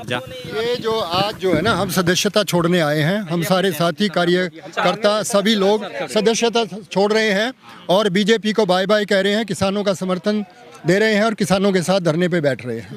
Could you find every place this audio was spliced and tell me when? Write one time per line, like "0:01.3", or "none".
none